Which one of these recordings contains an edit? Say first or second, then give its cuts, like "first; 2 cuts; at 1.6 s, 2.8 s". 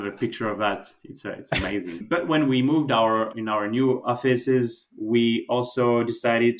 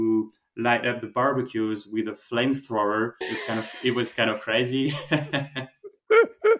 first; 1 cut; at 2.0 s